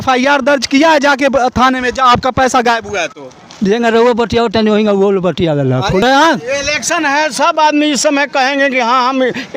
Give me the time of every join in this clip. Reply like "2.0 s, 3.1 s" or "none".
6.0 s